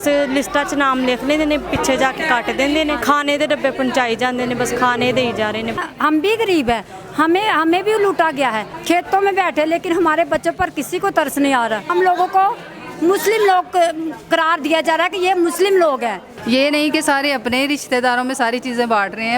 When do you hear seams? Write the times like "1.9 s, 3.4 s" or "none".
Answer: 3.0 s, 5.8 s, 8.7 s, 11.9 s, 16.3 s